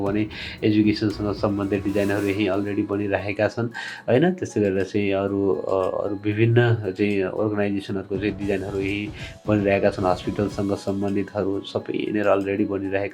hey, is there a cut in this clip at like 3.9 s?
no; 0 cuts

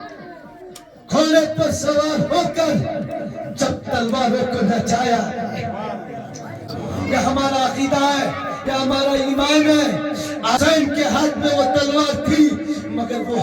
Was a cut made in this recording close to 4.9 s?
no; 2 cuts; at 6.7 s, 10.6 s

